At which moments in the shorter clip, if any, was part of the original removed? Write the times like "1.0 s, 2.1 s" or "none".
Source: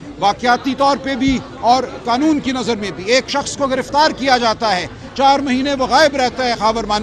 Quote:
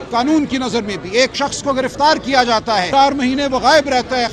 2.9 s